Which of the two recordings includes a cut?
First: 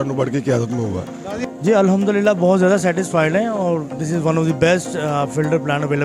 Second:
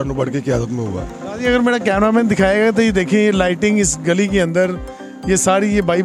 first; 1 cut; at 1.3 s

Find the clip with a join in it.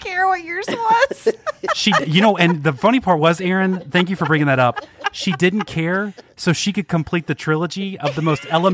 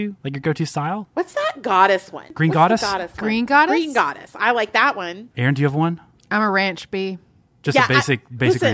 second; 3 cuts; at 1.1 s, 2.3 s, 5.2 s

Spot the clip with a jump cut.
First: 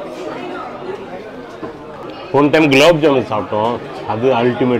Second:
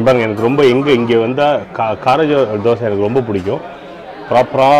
first; 1 cut; at 2.0 s

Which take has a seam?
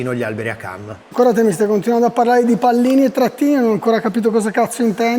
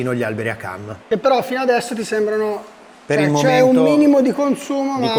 first; 1 cut; at 1.0 s

